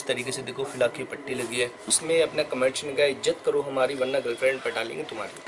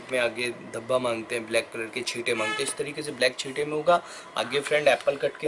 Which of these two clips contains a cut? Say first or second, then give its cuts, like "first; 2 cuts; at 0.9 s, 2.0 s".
first; 1 cut; at 1.9 s